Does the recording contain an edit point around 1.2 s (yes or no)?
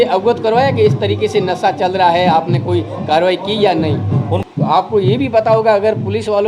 no